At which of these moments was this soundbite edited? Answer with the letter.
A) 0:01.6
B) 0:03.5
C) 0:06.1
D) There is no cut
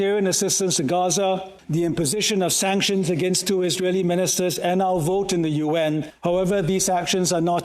C